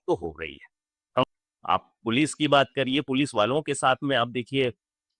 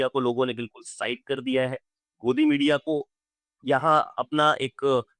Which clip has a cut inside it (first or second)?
first